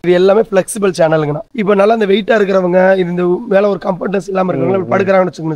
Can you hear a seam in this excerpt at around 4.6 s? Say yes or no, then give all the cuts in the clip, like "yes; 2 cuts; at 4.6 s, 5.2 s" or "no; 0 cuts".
no; 1 cut; at 1.4 s